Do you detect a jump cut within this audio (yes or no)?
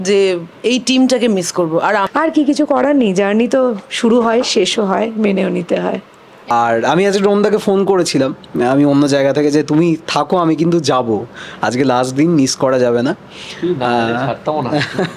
yes